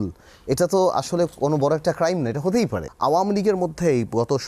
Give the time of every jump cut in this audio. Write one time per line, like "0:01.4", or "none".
0:02.8